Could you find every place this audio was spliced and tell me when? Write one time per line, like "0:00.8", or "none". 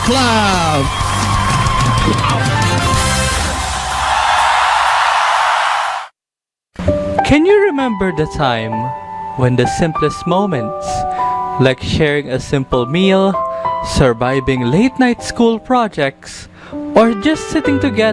none